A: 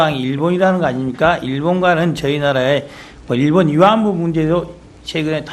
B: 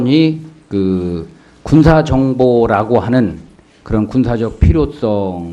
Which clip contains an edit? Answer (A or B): A